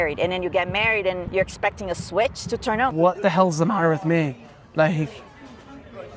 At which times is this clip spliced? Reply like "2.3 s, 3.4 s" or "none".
1.2 s, 2.9 s